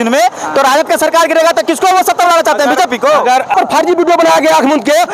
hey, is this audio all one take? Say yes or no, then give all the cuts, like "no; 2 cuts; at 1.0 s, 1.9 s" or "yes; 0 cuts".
no; 1 cut; at 3.5 s